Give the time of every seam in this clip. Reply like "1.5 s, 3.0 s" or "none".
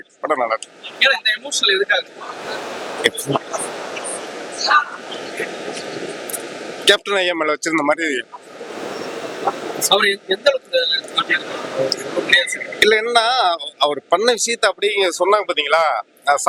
none